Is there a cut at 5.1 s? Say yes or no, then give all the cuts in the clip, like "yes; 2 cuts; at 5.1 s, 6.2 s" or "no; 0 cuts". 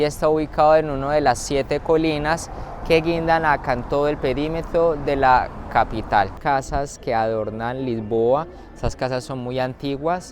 no; 1 cut; at 6.3 s